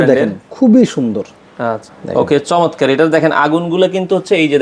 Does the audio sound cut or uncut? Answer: uncut